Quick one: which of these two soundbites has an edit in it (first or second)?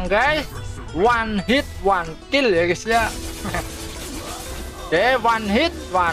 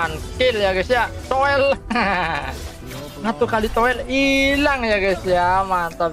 first